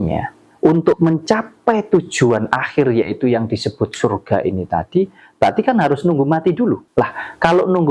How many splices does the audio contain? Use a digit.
1